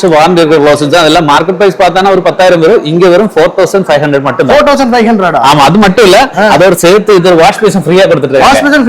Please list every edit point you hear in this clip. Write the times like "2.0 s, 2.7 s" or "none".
none